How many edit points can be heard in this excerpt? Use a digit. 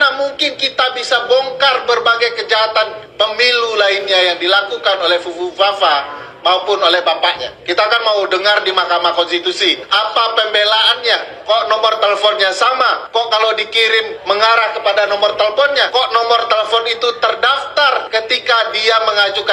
7